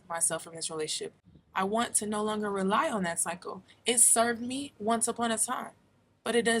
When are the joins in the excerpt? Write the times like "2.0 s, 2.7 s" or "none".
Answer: 1.3 s